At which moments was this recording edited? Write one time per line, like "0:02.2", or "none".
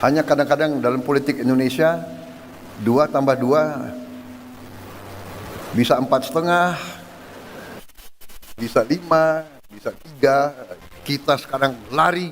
0:10.7